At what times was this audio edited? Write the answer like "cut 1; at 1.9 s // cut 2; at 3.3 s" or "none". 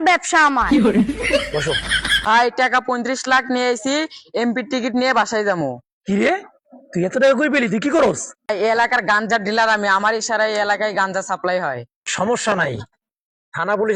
cut 1; at 2.2 s